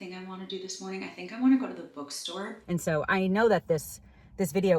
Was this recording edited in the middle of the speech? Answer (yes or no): yes